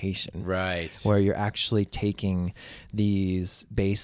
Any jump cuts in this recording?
no; 0 cuts

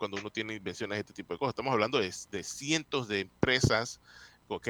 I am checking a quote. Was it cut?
no; 0 cuts

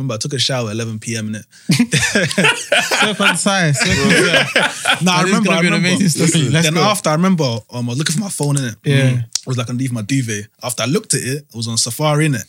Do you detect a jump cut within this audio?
no; 0 cuts

